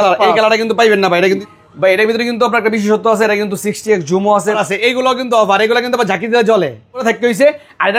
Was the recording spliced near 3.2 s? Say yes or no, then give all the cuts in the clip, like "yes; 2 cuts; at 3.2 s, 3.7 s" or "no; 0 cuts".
no; 3 cuts; at 1.4 s, 4.6 s, 7.0 s